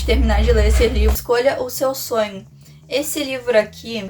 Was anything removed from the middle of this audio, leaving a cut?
yes; 1 cut; at 1.2 s

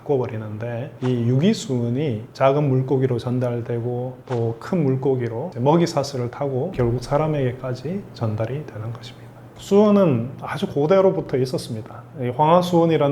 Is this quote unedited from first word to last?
yes; 0 cuts

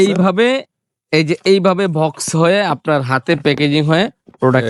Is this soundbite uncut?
yes; 0 cuts

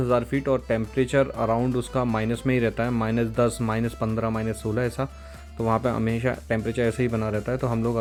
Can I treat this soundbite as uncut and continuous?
yes; 0 cuts

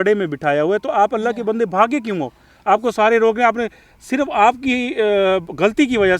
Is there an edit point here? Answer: no; 0 cuts

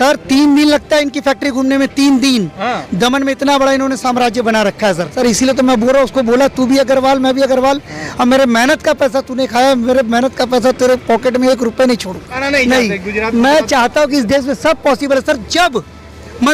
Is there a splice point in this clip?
yes; 2 cuts; at 5.1 s, 12.4 s

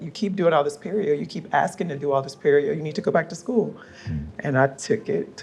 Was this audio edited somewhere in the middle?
no; 0 cuts

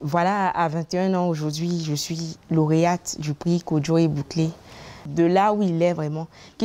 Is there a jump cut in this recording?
yes; 1 cut; at 5.0 s

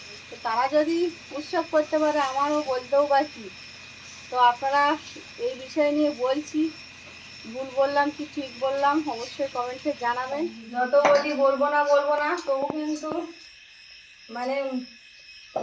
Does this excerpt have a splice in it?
yes; 1 cut; at 10.6 s

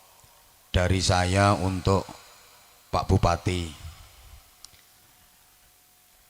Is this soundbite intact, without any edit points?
yes; 0 cuts

